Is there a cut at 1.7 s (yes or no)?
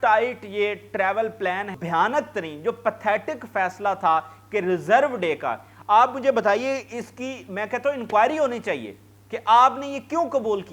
yes